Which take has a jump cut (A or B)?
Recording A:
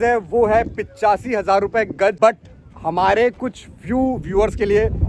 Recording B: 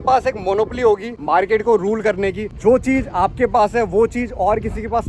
B